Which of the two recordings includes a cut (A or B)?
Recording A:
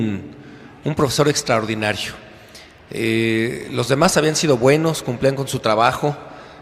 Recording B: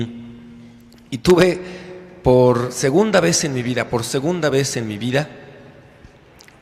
A